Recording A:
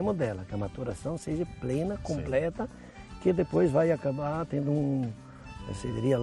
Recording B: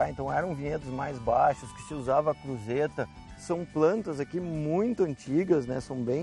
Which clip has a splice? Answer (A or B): B